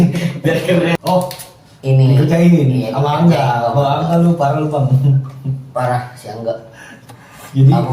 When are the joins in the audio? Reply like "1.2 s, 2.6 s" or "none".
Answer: 1.0 s